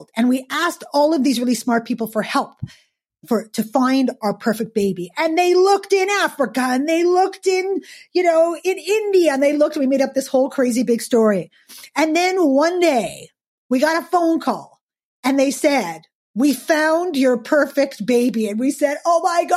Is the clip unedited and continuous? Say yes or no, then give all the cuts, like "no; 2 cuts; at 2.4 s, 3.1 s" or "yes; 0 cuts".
yes; 0 cuts